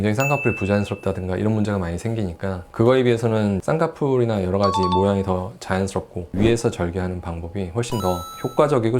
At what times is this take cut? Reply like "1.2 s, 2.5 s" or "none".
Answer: 3.6 s, 6.3 s